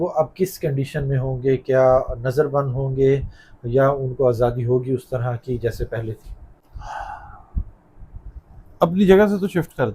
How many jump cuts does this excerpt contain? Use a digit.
0